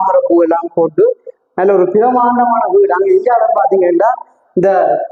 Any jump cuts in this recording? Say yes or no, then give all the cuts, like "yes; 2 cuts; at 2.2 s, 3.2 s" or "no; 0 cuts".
no; 0 cuts